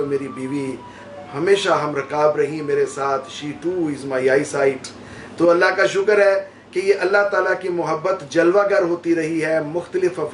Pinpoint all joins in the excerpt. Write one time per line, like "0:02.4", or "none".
none